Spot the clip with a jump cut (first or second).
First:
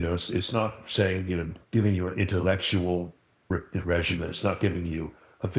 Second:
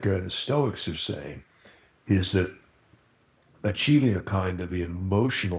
first